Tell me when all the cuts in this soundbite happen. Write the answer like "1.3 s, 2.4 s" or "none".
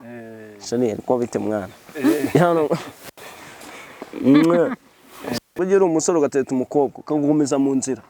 5.4 s